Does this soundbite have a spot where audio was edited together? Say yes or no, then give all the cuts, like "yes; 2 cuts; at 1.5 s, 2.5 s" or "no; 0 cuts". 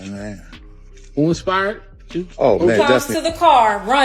yes; 1 cut; at 3.1 s